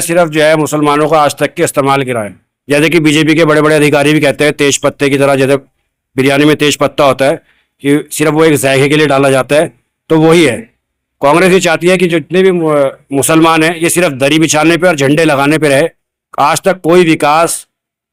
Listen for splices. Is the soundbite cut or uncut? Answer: uncut